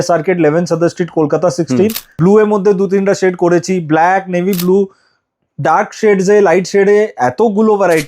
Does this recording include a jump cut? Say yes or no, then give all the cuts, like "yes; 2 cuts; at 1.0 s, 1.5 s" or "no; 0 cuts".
yes; 1 cut; at 2.0 s